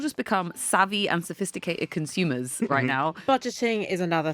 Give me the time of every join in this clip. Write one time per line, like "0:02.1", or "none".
0:03.2